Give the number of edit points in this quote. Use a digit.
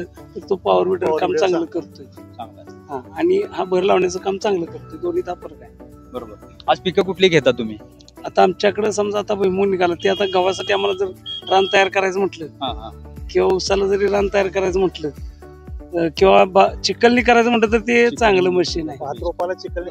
0